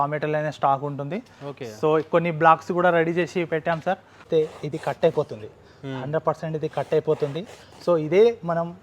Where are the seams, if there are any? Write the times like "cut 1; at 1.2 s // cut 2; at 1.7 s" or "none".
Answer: cut 1; at 4.2 s